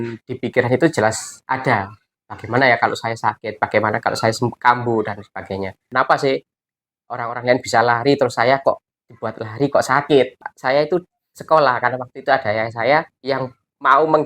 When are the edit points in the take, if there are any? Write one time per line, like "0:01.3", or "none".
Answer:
0:05.9
0:10.5